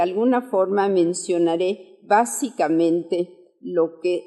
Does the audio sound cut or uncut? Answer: uncut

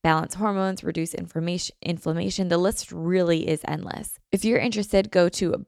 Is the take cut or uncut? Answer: cut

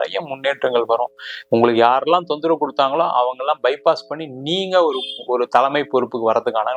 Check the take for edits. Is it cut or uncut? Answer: uncut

